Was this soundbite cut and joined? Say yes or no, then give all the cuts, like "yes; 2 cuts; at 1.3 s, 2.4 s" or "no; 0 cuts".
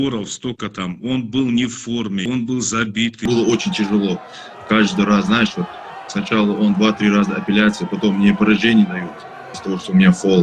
yes; 2 cuts; at 2.2 s, 3.3 s